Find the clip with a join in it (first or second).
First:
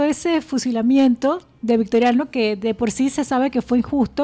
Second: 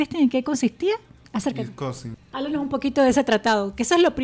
second